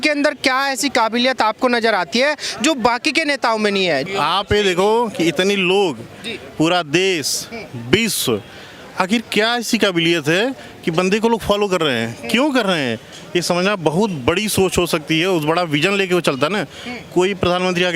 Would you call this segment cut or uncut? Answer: cut